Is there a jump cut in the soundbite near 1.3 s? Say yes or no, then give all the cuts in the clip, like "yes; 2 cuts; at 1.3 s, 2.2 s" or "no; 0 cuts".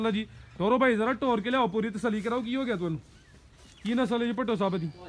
no; 0 cuts